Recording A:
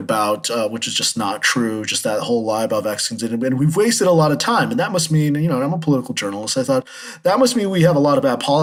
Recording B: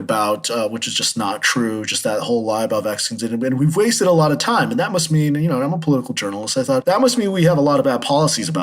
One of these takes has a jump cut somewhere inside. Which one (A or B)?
B